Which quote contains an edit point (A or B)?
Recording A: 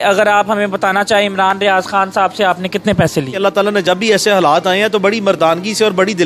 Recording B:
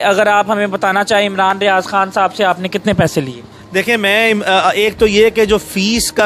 A